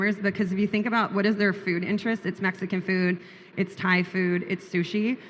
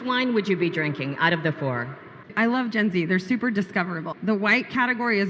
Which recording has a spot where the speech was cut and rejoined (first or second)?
second